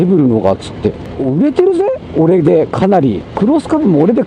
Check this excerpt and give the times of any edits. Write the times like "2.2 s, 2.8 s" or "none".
1.1 s, 3.3 s

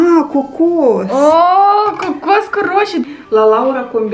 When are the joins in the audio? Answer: 3.0 s

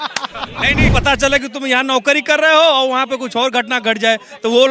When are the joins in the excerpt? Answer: 0.9 s

